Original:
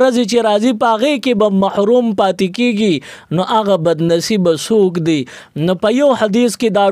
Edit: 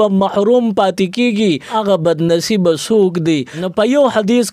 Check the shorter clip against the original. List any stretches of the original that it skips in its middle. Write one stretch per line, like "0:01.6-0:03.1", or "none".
0:03.2-0:03.5
0:05.4-0:05.6